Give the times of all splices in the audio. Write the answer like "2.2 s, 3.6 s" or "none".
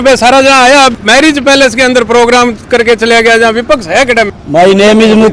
1.0 s, 4.3 s